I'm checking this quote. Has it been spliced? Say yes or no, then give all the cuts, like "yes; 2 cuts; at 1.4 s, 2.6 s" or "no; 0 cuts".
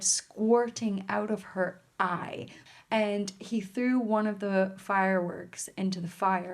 yes; 1 cut; at 2.6 s